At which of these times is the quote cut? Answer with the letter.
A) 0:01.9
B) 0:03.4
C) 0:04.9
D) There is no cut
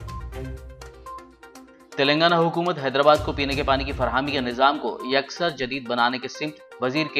A